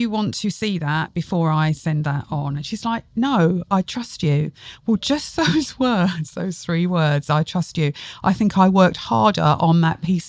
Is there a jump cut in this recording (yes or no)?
no